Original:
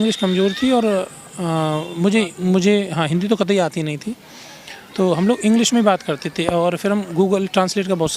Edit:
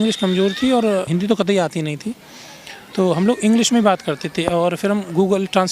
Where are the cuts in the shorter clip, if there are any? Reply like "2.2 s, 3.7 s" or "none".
1.1 s